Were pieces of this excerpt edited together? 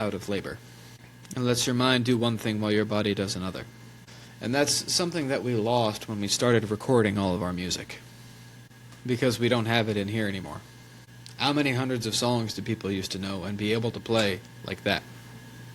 no; 0 cuts

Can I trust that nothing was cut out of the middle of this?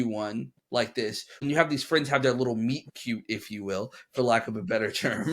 no; 1 cut; at 1.3 s

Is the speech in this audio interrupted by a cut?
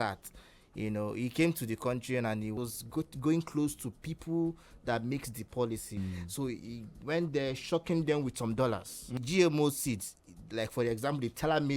yes; 3 cuts; at 2.6 s, 6.0 s, 9.2 s

